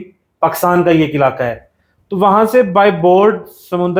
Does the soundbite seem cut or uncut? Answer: uncut